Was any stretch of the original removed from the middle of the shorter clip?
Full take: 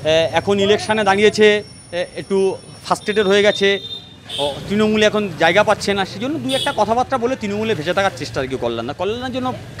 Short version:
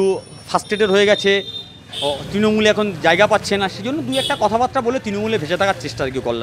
no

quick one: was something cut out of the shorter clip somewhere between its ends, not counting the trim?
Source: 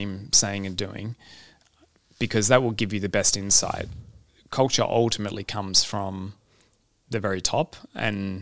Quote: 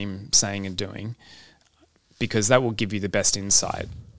no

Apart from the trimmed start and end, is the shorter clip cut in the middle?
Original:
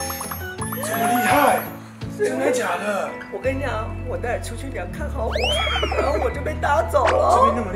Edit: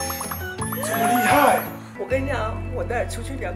yes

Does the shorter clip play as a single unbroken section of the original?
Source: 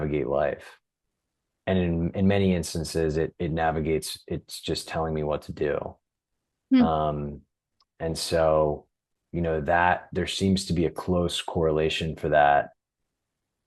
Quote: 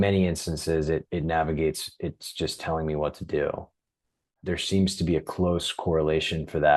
no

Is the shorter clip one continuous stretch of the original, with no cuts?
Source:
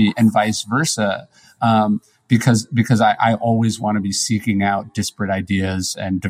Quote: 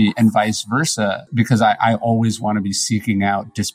no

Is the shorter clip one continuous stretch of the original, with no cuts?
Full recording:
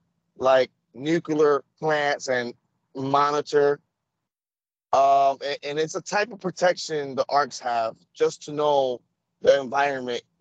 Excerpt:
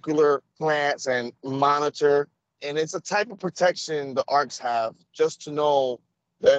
no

